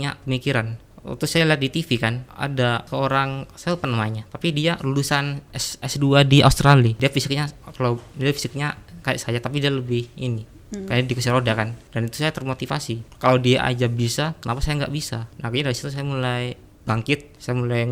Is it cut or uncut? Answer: cut